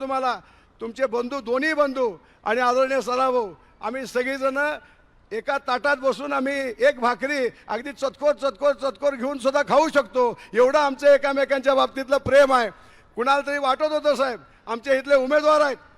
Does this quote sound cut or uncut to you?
uncut